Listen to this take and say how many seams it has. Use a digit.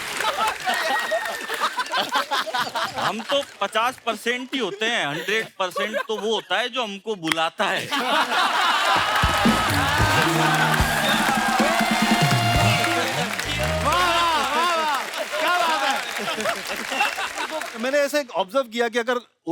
1